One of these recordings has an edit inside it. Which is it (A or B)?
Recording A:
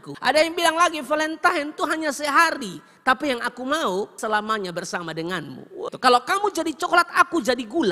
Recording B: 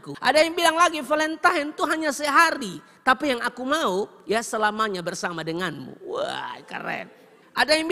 A